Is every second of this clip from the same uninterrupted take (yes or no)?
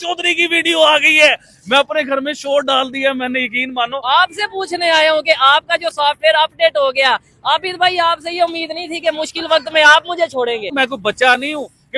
no